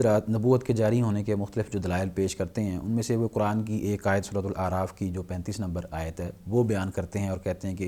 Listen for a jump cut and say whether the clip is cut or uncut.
uncut